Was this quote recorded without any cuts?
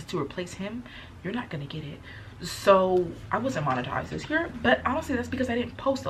yes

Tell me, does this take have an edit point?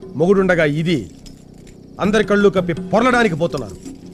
no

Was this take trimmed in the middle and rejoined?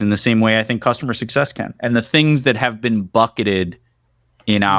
no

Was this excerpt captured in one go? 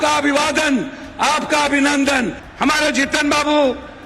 no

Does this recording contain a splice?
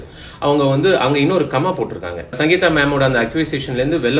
yes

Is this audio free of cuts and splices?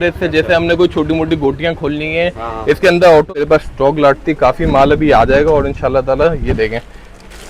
no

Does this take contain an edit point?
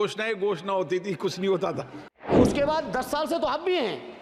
yes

